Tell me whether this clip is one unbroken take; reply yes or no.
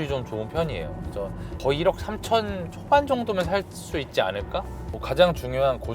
no